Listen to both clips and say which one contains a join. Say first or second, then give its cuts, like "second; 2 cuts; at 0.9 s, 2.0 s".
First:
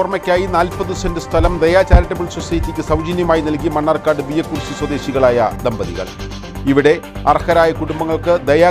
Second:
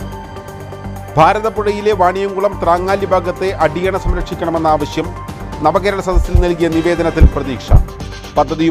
second; 1 cut; at 1.1 s